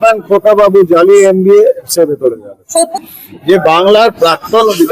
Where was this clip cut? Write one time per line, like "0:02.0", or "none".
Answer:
0:02.9